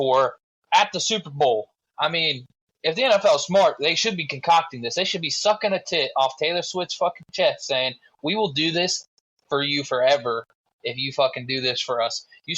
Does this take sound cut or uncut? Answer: uncut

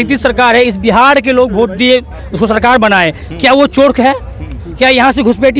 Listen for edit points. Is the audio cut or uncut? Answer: uncut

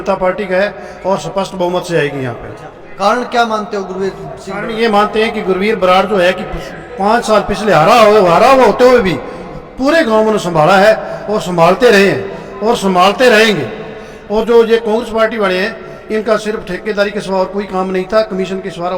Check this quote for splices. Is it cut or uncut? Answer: uncut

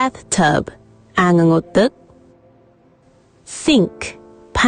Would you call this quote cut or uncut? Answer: uncut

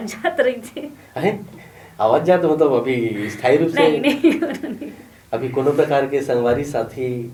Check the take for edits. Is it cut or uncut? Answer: uncut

